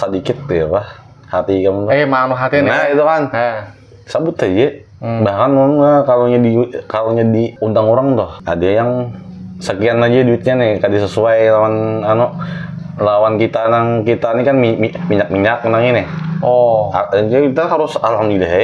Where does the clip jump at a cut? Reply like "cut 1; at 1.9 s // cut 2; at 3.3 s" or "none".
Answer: cut 1; at 7.6 s // cut 2; at 8.4 s